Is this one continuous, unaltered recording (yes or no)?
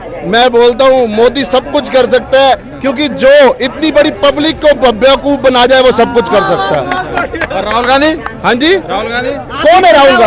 yes